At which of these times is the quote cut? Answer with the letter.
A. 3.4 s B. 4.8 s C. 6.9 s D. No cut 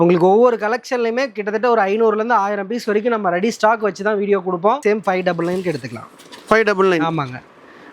B